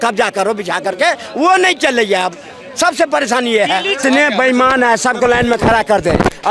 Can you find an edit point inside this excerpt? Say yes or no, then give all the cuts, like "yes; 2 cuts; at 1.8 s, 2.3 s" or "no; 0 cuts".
yes; 1 cut; at 4.0 s